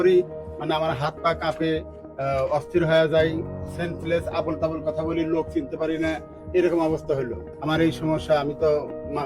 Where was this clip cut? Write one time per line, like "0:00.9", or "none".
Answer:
0:07.4